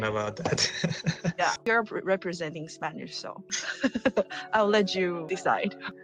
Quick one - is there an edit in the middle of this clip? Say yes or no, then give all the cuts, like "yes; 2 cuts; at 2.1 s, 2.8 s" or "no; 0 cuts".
no; 0 cuts